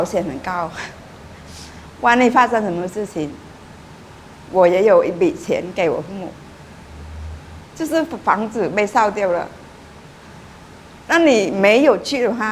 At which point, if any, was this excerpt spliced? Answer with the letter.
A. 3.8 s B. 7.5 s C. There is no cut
B